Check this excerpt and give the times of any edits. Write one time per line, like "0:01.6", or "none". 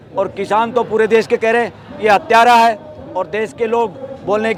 none